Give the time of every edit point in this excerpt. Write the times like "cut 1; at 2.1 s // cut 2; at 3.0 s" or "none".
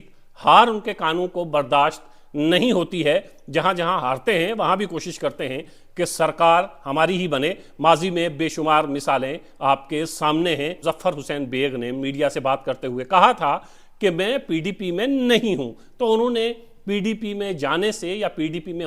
cut 1; at 10.8 s